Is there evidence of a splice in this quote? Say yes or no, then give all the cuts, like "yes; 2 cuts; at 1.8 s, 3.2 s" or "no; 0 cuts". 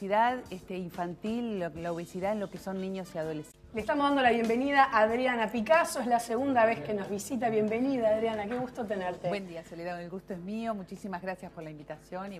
no; 0 cuts